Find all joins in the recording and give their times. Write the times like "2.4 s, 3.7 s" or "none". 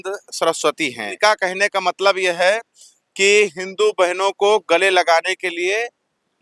1.1 s